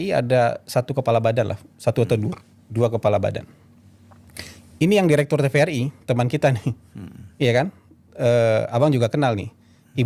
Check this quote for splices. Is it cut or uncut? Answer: uncut